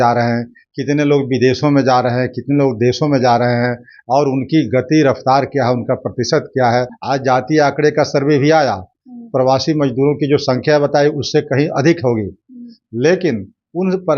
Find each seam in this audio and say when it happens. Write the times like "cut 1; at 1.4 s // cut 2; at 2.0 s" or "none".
cut 1; at 7.0 s